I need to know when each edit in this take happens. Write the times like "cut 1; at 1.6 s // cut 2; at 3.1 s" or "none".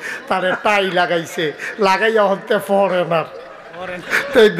none

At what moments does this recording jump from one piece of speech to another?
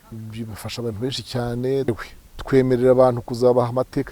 cut 1; at 1.9 s

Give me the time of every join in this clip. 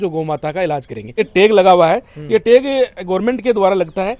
cut 1; at 1.2 s

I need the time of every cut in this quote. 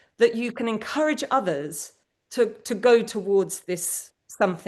none

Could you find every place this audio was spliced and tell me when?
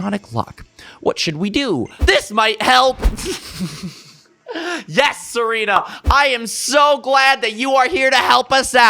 cut 1; at 1.9 s

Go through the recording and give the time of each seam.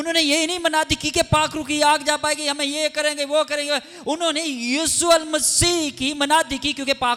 none

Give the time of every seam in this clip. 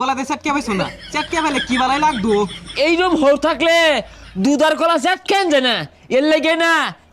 none

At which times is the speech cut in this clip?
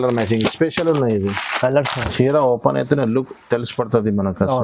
cut 1; at 2.0 s

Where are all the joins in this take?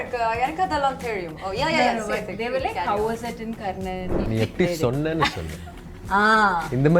cut 1; at 4.2 s

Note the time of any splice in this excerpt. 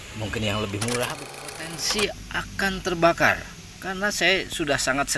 cut 1; at 1.3 s

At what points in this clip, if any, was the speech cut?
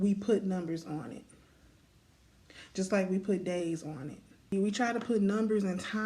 cut 1; at 4.5 s

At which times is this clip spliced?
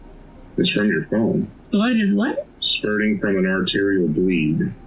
none

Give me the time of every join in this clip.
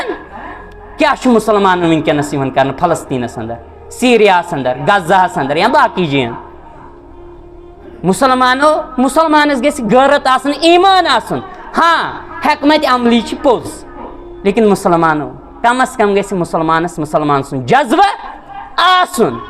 none

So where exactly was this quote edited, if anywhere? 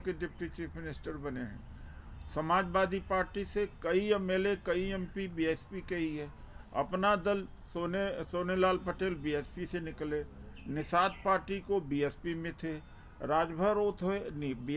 none

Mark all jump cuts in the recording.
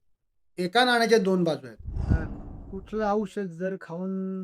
cut 1; at 2.1 s

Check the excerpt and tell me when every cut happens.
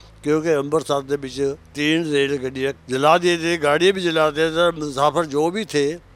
cut 1; at 1.7 s // cut 2; at 2.8 s

